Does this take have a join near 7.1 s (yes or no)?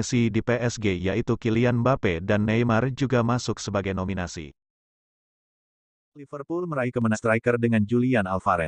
yes